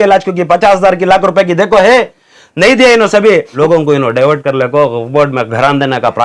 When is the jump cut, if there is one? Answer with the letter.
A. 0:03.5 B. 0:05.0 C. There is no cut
A